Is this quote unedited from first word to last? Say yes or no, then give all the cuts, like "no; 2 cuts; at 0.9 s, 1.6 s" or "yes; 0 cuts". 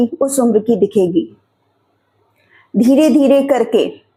yes; 0 cuts